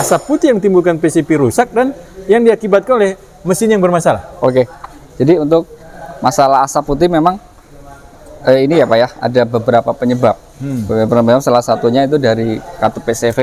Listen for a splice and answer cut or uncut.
uncut